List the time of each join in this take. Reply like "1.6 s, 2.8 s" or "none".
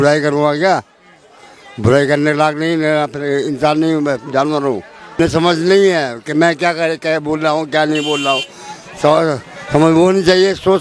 5.2 s